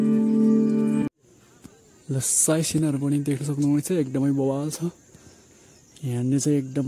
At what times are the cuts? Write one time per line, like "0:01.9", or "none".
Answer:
0:01.1